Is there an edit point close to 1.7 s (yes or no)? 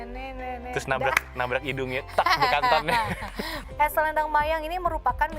no